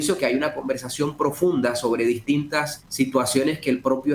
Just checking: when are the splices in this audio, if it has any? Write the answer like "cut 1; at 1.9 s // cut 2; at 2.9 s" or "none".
cut 1; at 2.8 s